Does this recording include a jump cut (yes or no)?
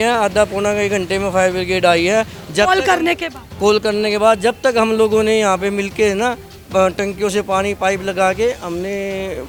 no